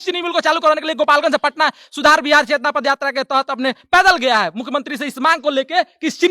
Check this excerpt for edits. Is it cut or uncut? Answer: uncut